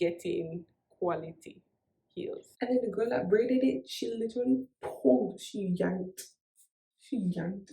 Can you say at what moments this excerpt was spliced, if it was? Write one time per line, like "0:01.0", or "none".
0:02.5